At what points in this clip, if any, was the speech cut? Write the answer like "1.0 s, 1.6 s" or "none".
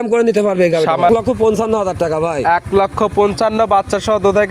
1.1 s

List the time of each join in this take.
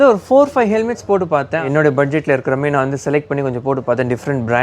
1.6 s

